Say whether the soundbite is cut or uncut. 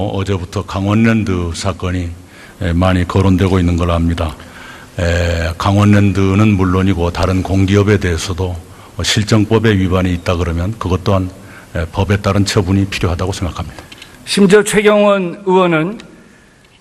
uncut